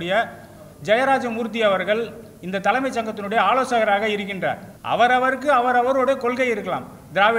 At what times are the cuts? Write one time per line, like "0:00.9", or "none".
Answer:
0:04.7